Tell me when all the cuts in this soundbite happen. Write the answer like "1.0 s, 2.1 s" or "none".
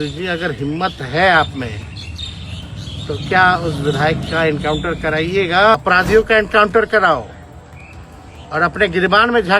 5.7 s

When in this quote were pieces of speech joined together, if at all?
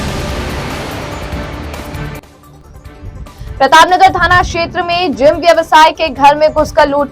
2.4 s

